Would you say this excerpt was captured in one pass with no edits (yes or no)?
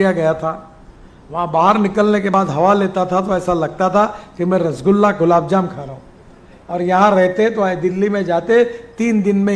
yes